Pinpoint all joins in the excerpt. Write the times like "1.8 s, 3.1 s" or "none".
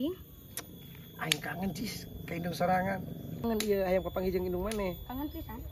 3.4 s